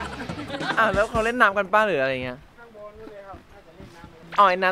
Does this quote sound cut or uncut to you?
uncut